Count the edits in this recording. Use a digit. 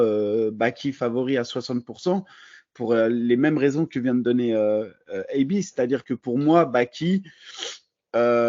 0